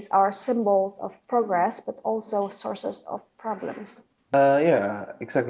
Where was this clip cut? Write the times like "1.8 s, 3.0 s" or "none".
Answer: 4.3 s